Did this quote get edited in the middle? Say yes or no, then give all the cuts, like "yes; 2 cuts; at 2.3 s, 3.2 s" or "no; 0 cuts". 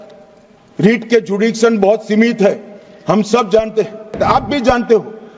yes; 1 cut; at 4.1 s